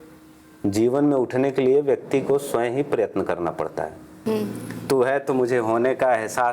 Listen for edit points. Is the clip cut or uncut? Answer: cut